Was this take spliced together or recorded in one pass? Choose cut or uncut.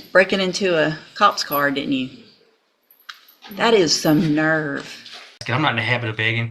cut